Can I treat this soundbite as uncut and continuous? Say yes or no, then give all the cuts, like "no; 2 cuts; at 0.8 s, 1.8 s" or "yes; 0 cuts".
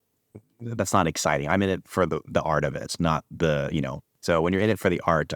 no; 1 cut; at 4.1 s